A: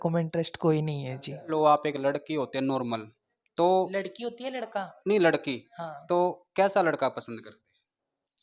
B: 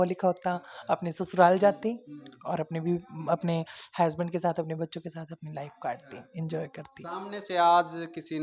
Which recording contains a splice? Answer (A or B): A